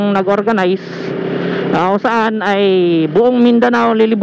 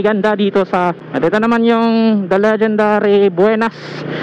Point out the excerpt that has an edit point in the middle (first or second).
second